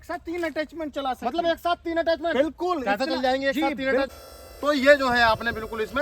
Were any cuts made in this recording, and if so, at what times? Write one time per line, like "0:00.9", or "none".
0:04.2